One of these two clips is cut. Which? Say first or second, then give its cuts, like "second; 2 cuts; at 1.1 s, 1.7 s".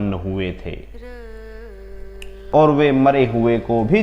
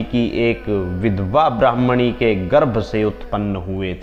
first; 1 cut; at 2.3 s